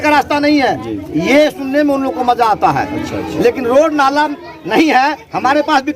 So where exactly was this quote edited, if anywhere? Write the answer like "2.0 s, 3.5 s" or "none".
none